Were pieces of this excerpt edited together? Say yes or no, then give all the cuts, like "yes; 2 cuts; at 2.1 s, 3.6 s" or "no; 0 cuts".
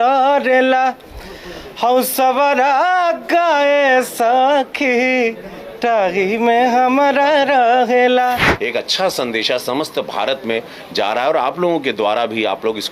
yes; 1 cut; at 8.5 s